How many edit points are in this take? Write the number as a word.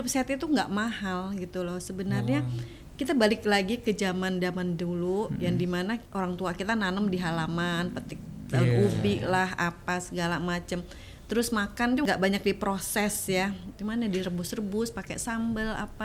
two